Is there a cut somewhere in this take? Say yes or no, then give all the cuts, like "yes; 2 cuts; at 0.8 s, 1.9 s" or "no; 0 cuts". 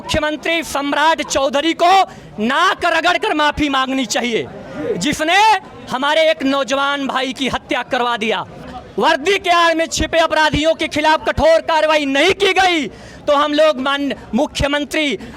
yes; 1 cut; at 8.6 s